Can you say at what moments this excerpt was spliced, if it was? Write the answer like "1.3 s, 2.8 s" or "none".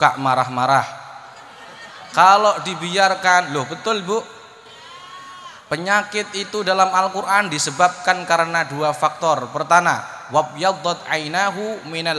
none